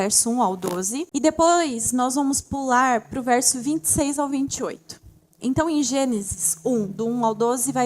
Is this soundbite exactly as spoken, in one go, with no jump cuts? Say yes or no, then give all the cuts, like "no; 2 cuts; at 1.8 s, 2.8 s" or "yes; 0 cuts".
no; 1 cut; at 1.1 s